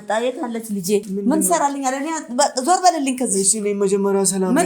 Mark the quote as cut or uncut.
cut